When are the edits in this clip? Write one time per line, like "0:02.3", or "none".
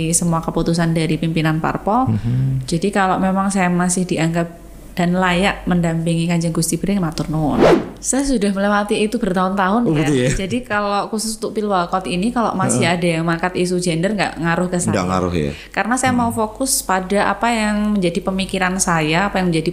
0:07.8